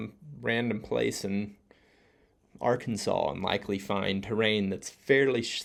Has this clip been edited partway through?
no; 0 cuts

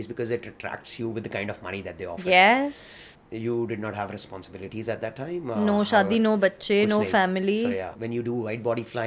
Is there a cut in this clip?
yes; 2 cuts; at 3.1 s, 8.0 s

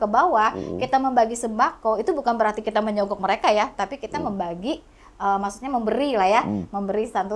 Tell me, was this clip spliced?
no; 0 cuts

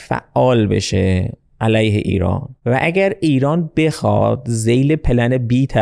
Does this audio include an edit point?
yes; 1 cut; at 2.5 s

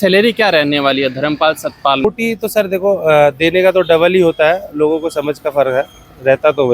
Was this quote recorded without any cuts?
no; 1 cut; at 2.0 s

